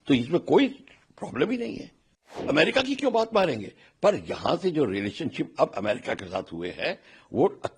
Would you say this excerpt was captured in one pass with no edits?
no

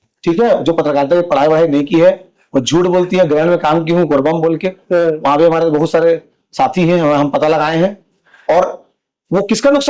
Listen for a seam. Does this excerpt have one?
no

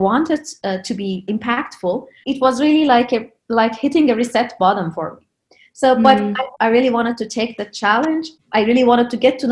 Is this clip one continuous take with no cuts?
no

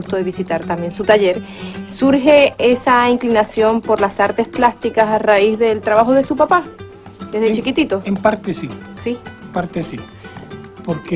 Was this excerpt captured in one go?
no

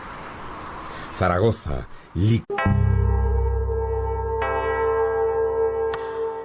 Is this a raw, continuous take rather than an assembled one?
yes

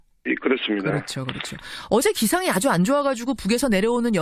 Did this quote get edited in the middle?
yes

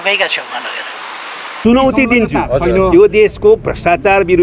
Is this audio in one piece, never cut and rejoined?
no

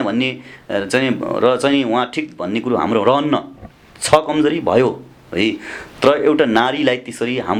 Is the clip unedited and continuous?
yes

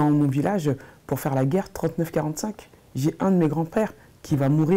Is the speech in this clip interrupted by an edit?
no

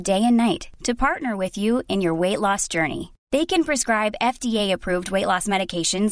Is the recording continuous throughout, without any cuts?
yes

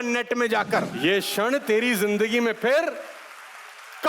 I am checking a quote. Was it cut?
yes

